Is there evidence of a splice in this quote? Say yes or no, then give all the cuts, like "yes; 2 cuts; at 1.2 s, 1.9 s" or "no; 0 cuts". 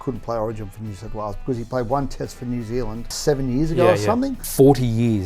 yes; 2 cuts; at 3.1 s, 4.4 s